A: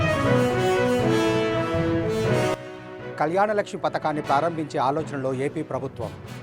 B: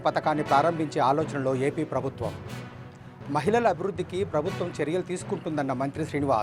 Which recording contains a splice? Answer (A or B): A